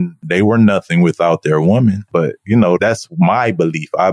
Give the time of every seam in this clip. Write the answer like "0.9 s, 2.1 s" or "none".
2.1 s